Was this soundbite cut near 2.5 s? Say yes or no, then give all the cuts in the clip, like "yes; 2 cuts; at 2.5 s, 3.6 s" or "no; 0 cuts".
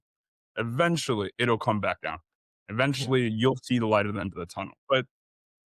no; 1 cut; at 4.7 s